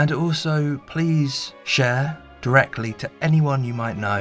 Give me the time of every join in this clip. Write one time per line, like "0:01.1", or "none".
none